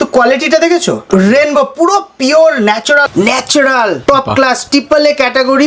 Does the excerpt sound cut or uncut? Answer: cut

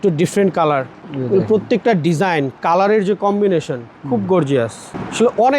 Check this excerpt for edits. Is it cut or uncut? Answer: cut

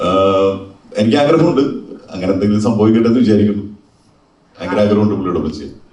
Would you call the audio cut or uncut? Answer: uncut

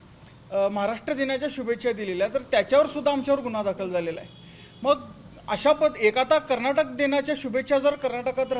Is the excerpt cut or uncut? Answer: uncut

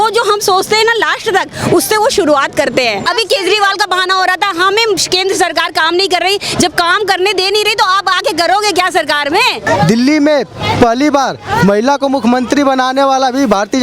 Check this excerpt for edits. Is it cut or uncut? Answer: cut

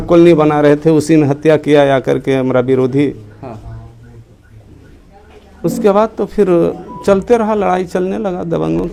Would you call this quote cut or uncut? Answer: uncut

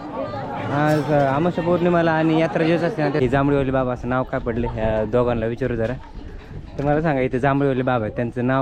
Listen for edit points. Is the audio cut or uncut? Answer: cut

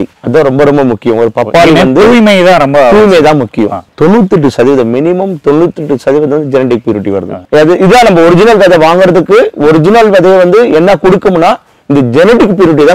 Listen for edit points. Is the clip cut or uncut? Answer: uncut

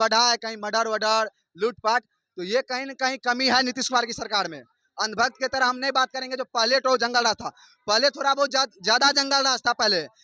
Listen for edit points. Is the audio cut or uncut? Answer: uncut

